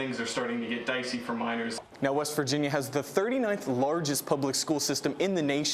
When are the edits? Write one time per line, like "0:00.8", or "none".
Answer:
0:01.8